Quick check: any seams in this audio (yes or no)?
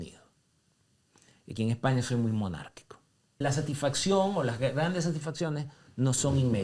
yes